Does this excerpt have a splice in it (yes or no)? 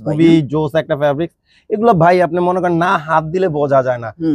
no